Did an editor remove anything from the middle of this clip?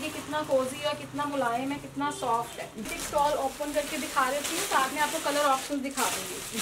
yes; 1 cut; at 2.9 s

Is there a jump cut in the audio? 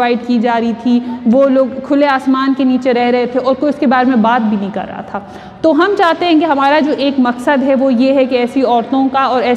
no; 0 cuts

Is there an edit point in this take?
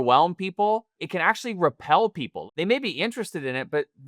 yes; 2 cuts; at 1.0 s, 2.4 s

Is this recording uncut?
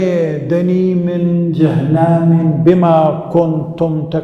yes; 0 cuts

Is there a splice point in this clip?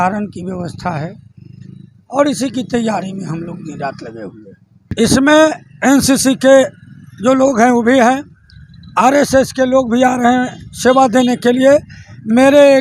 yes; 1 cut; at 4.8 s

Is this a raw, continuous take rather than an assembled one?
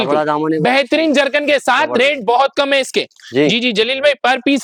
yes; 0 cuts

